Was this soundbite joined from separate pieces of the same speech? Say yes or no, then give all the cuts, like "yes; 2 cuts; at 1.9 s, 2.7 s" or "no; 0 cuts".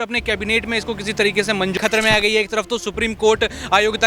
yes; 1 cut; at 1.7 s